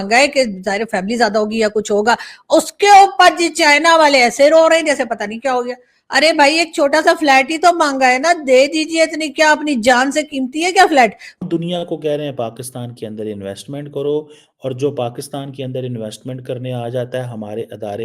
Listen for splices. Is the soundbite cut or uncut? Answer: cut